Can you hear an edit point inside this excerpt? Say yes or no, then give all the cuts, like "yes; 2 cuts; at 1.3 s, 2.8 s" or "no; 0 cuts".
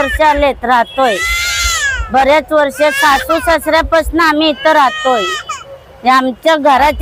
no; 0 cuts